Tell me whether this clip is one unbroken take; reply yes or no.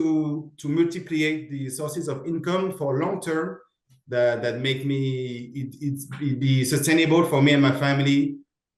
yes